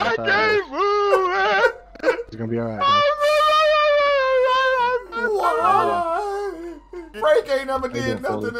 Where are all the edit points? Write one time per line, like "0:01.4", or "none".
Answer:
0:07.1